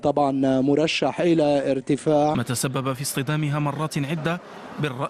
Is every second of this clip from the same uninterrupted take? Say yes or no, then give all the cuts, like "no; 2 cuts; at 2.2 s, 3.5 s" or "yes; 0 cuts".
yes; 0 cuts